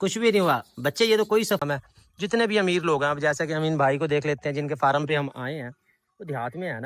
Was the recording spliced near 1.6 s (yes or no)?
yes